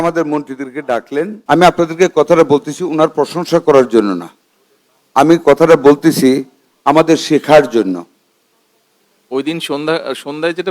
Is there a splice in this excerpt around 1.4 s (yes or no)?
yes